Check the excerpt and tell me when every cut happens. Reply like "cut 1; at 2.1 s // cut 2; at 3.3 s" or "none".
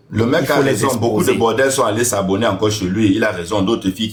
none